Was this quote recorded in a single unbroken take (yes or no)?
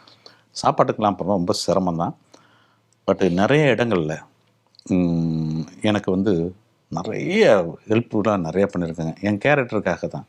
yes